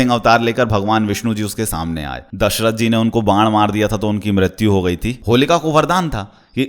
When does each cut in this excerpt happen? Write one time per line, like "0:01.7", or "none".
0:02.3
0:05.1

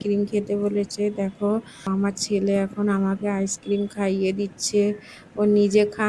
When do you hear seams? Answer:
0:01.9

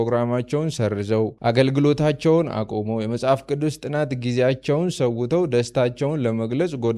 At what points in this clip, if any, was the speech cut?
none

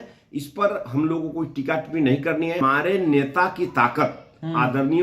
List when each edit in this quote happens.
0:02.6

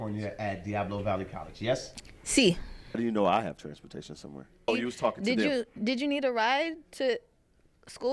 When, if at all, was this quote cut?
0:03.0
0:04.7

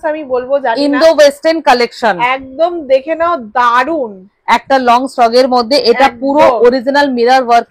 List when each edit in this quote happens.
none

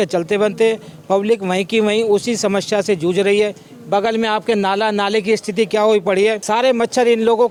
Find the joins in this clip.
none

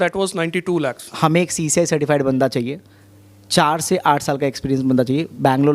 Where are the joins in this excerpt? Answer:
0:01.0

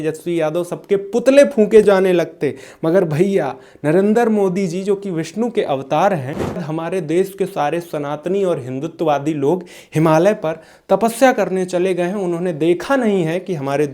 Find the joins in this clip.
0:06.6

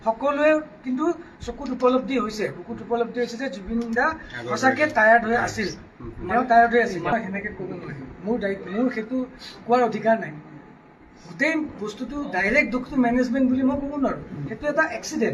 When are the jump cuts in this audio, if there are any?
none

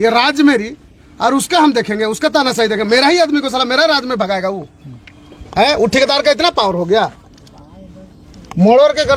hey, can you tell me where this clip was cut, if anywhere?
none

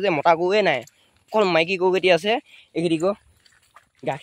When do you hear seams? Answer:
none

